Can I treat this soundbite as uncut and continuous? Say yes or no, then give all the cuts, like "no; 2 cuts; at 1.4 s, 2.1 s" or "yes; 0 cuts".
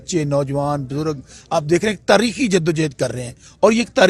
yes; 0 cuts